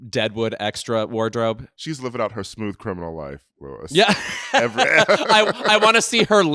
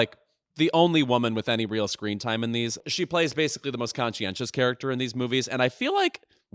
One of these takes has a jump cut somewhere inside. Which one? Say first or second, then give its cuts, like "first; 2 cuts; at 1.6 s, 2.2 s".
second; 1 cut; at 2.8 s